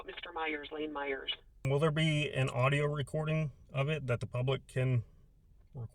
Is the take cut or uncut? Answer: cut